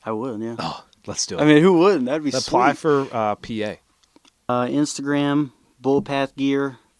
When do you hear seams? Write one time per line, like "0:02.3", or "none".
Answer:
0:04.5